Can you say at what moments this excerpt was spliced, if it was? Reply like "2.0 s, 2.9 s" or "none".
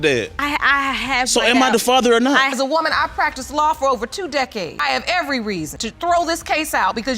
2.4 s, 4.8 s, 5.8 s